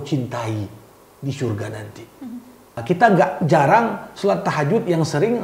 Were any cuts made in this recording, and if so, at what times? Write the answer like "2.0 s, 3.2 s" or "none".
2.7 s